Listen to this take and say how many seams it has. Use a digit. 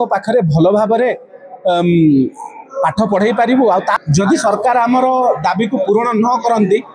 1